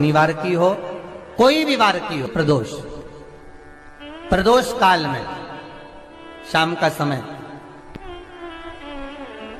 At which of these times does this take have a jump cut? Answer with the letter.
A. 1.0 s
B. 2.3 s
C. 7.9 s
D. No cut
B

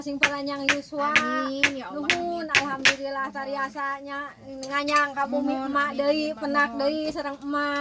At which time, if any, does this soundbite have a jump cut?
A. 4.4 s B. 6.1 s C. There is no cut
C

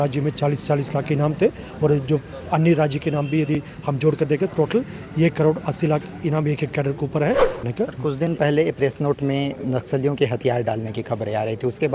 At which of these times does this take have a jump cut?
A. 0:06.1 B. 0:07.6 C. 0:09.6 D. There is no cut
B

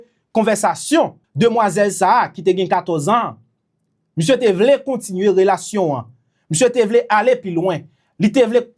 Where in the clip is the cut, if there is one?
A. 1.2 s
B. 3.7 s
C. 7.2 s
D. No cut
A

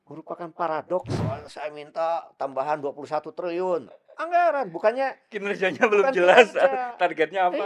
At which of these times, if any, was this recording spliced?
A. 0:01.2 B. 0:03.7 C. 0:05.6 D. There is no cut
A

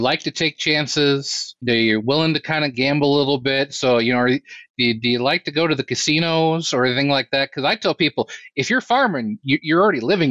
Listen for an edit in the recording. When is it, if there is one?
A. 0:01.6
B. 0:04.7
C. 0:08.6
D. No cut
A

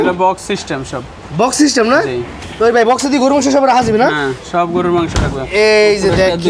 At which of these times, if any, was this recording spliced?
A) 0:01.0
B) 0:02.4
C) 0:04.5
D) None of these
D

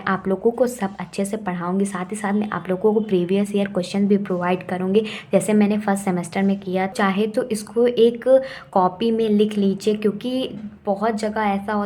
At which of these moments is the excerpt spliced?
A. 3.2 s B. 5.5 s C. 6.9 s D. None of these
C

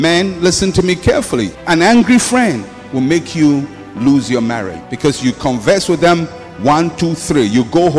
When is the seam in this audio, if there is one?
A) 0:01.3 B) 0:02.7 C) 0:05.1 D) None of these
D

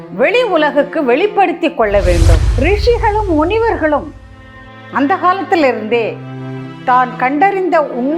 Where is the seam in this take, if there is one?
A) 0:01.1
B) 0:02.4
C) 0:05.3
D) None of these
B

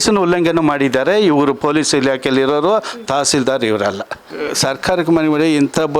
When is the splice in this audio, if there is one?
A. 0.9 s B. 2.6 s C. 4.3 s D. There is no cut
C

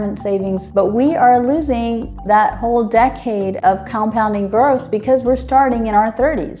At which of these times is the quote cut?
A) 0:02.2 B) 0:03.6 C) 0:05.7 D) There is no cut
D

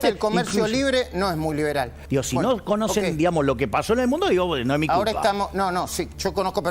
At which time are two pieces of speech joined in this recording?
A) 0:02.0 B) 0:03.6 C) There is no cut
A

